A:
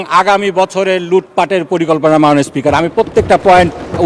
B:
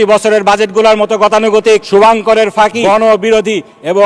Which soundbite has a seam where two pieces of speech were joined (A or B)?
B